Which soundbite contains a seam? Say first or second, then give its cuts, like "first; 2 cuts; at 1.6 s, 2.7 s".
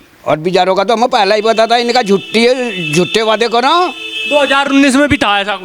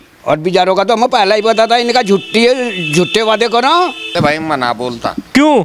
second; 1 cut; at 4.1 s